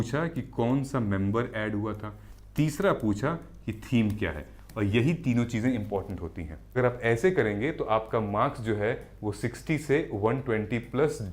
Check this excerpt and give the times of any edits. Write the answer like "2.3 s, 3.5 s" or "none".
6.7 s